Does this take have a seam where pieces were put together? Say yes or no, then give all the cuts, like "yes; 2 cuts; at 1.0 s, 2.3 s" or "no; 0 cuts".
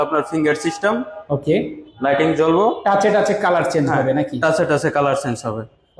no; 0 cuts